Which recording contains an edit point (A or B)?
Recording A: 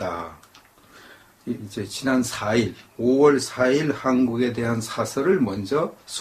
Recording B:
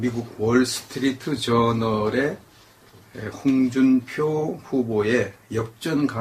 A